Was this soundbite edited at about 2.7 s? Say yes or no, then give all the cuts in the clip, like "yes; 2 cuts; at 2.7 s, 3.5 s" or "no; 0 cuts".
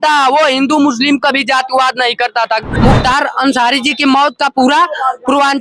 yes; 1 cut; at 2.7 s